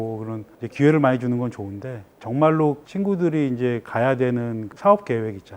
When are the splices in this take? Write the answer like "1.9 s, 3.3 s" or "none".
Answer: 4.6 s